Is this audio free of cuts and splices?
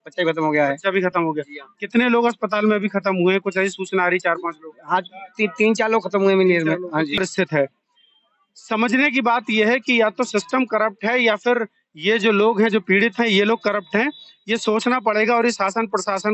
no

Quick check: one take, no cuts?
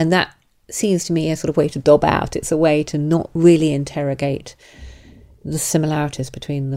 yes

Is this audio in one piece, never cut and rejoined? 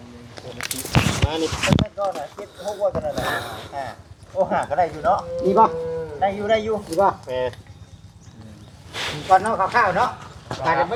yes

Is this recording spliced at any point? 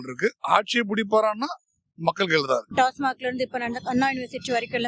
yes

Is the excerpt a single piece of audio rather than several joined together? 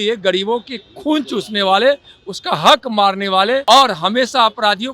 no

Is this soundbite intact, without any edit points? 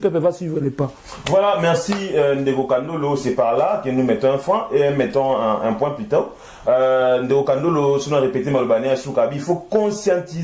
yes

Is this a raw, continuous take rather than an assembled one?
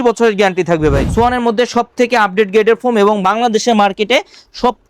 no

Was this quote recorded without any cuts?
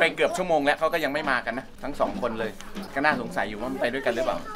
no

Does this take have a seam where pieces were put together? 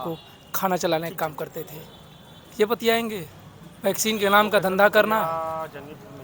no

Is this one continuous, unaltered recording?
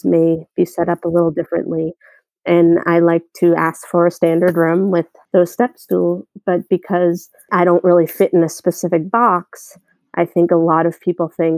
no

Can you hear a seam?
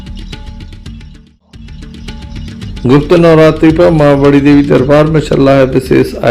yes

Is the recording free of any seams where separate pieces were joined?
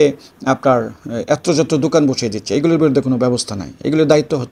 yes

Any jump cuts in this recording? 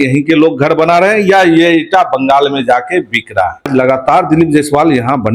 yes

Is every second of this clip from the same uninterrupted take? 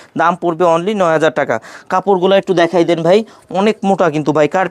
yes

